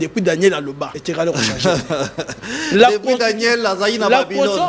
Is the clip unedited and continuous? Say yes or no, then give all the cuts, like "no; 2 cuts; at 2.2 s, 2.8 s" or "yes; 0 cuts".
no; 1 cut; at 1.0 s